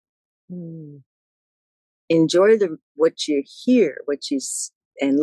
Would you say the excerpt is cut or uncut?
uncut